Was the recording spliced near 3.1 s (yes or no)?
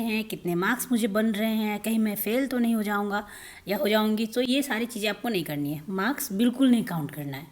no